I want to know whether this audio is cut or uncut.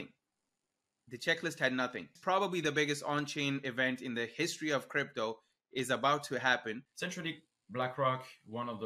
cut